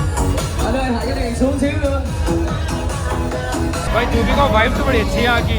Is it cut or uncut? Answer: cut